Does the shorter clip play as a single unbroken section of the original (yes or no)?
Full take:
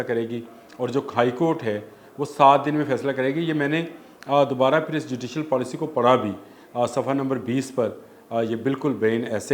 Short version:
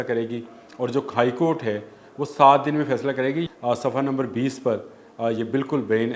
no